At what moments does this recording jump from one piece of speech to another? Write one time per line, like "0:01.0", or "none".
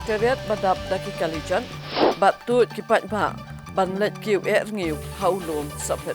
0:02.1